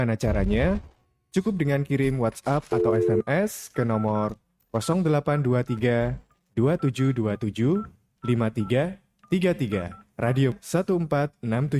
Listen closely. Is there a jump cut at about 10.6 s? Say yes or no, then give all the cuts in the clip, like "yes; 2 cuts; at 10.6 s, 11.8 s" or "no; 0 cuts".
yes; 1 cut; at 10.6 s